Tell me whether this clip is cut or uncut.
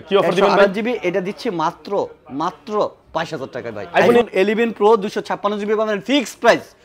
cut